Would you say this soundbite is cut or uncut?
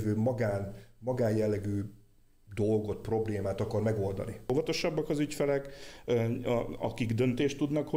cut